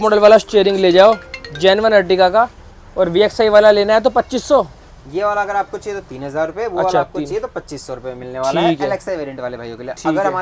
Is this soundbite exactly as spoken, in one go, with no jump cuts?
yes; 0 cuts

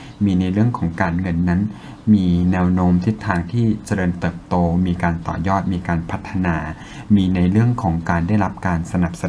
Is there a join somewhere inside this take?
no; 0 cuts

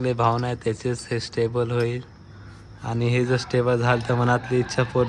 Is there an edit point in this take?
no; 0 cuts

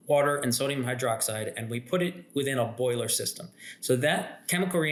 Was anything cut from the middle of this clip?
no; 0 cuts

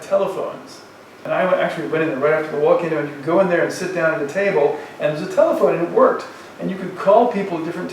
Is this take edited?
yes; 1 cut; at 1.2 s

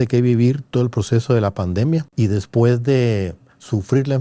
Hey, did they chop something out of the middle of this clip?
yes; 1 cut; at 2.1 s

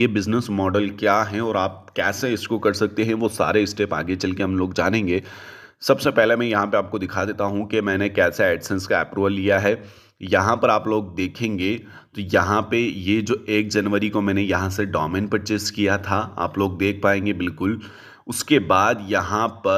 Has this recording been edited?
no; 0 cuts

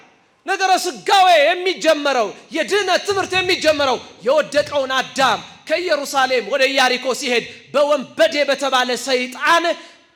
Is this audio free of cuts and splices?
yes; 0 cuts

